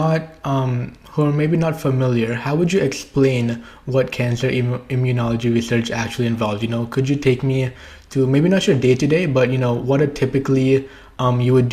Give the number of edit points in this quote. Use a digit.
0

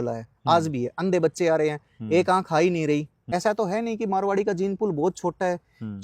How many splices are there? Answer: 1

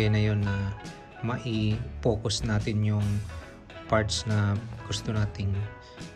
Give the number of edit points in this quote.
1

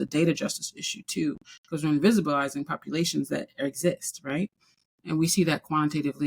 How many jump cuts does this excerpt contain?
1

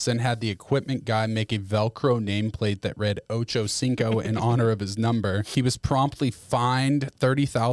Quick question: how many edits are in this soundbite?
1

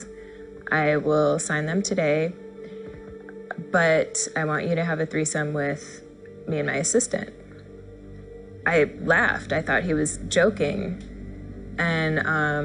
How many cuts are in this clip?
0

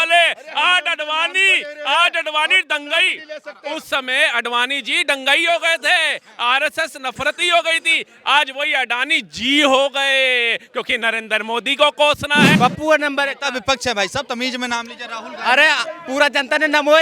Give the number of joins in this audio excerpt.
1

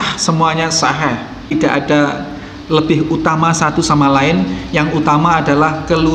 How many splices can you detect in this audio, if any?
1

